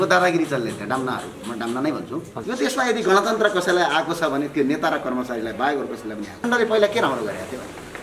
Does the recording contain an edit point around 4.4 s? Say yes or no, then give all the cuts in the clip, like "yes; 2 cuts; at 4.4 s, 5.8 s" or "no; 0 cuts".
no; 2 cuts; at 2.3 s, 6.4 s